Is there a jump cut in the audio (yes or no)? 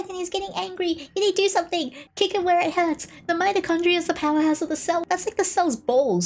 yes